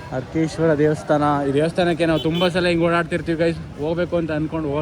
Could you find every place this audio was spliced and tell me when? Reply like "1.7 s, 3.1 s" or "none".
none

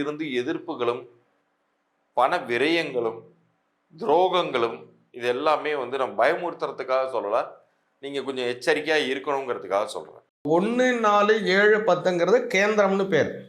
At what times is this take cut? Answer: 10.3 s

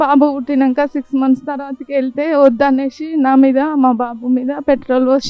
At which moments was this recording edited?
none

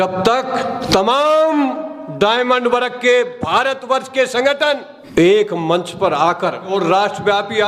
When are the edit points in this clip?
6.7 s

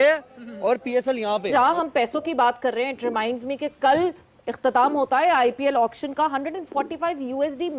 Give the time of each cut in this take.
1.5 s

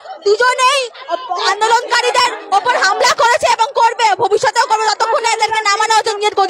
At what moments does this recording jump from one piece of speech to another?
none

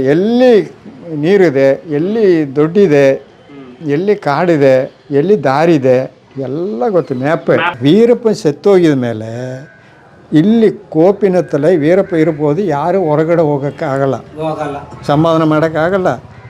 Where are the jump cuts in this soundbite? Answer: 7.7 s

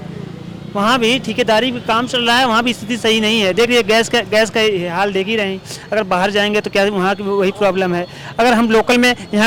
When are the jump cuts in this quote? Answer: none

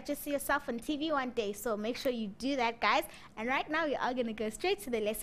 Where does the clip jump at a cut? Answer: 3.5 s

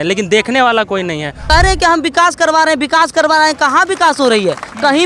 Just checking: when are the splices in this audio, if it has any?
1.4 s

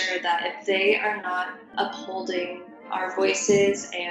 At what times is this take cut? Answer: 1.7 s, 2.8 s

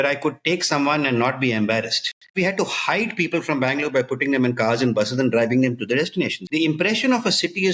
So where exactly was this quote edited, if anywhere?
2.3 s, 6.4 s

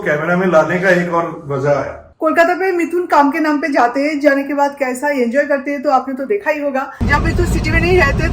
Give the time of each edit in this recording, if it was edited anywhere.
2.1 s, 7.0 s

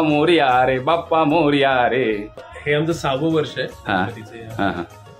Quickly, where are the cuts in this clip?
2.5 s

